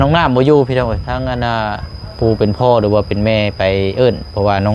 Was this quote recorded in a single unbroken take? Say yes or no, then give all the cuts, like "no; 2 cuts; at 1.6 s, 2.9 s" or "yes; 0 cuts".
yes; 0 cuts